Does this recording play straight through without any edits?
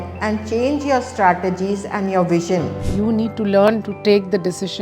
no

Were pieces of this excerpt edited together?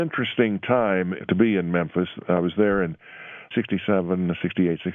yes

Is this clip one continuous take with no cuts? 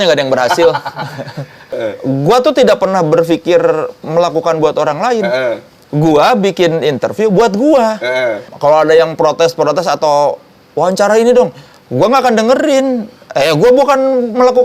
no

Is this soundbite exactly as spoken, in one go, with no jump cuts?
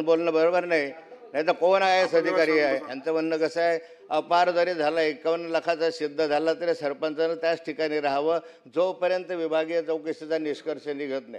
no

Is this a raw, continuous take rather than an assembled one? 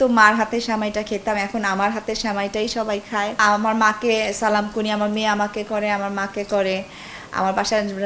yes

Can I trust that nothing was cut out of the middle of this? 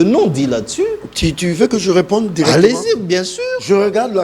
yes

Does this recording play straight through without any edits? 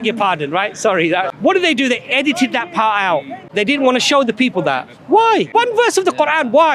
no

